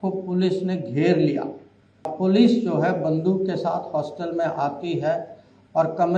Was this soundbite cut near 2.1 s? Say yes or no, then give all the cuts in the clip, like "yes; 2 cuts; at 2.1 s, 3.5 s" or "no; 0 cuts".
yes; 1 cut; at 2.1 s